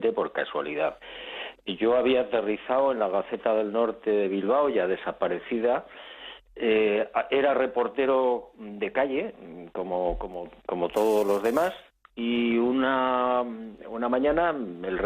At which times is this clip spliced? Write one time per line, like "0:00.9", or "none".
0:12.2